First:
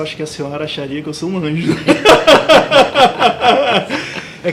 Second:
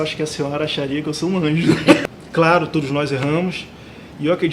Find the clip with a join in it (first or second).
second